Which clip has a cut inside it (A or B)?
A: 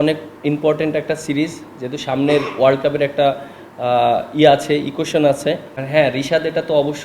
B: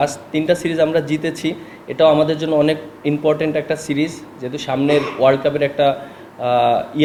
A